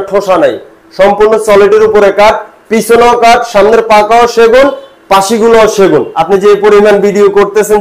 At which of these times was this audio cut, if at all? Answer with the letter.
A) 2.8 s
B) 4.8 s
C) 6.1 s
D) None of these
C